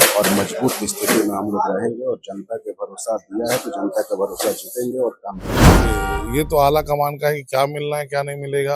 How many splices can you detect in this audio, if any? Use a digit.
1